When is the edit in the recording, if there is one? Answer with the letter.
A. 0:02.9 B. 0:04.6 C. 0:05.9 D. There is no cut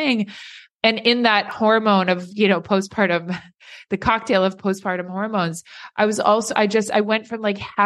D